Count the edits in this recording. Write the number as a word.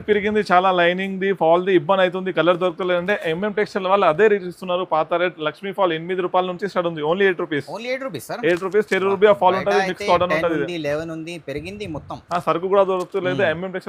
zero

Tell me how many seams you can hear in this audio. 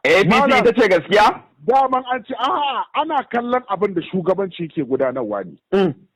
zero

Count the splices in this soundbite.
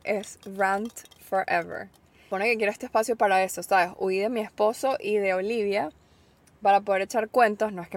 one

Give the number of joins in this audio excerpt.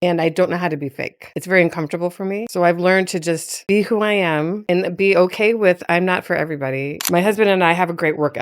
three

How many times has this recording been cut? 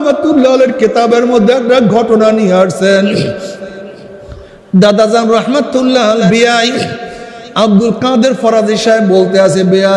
one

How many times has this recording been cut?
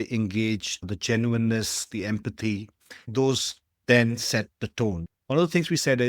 one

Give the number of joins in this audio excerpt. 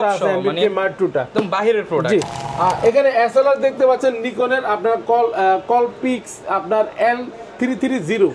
one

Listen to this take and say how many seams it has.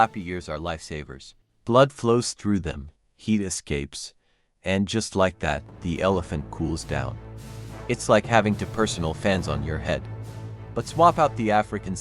one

